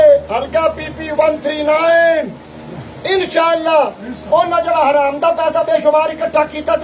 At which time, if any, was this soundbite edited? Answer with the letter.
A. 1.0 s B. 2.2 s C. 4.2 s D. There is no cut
D